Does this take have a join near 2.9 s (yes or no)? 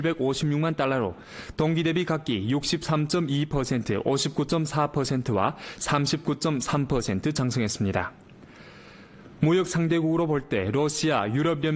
yes